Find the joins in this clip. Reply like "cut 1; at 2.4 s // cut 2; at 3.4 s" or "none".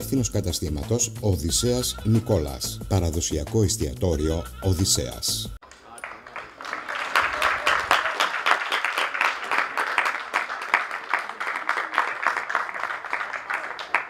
none